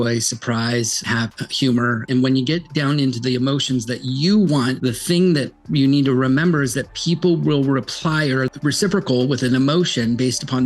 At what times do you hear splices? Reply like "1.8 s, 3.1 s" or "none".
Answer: 1.0 s, 2.1 s, 4.8 s, 8.5 s